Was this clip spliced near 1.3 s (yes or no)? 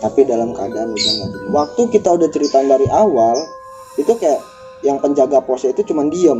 yes